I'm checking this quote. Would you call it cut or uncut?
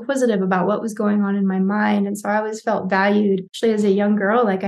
cut